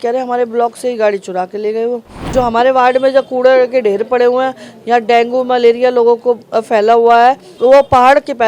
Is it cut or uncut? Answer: cut